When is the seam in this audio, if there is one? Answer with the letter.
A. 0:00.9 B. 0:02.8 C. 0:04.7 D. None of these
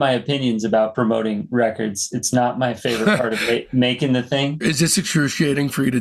A